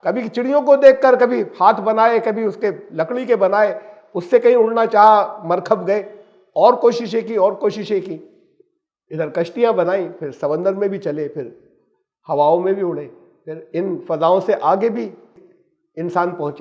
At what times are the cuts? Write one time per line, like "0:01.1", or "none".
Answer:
0:15.3